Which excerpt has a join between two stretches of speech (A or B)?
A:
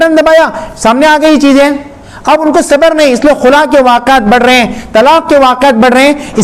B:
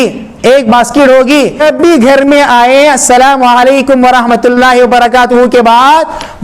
B